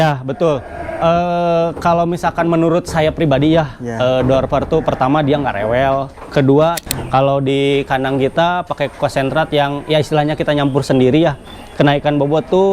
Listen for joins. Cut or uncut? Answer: cut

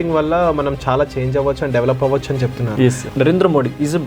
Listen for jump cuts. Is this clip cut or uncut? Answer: cut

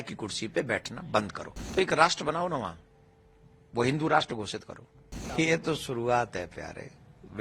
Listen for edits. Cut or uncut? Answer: cut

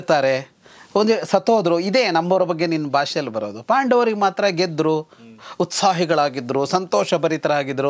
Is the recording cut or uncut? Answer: uncut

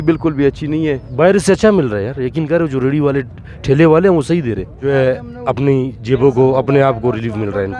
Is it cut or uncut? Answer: cut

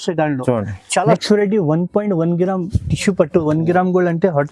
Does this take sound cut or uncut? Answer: cut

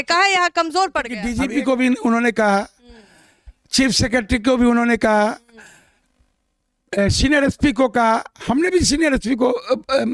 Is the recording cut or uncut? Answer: cut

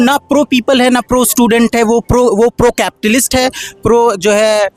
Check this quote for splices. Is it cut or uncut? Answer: uncut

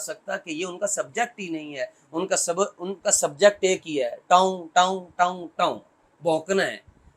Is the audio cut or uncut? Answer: uncut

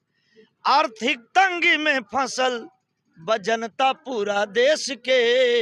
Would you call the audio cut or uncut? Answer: uncut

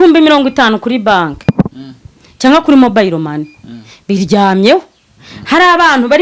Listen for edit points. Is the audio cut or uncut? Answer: uncut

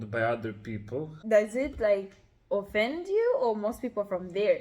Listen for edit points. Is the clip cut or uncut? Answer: cut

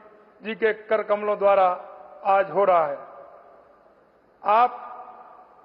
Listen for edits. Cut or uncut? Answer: uncut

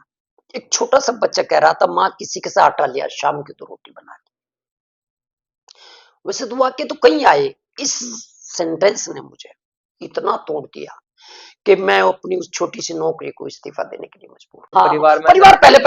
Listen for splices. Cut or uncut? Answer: cut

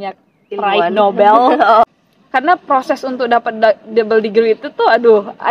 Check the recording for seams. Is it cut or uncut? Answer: cut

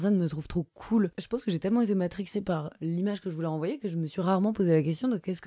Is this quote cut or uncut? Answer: cut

